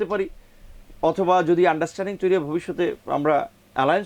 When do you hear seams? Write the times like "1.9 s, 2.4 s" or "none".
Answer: none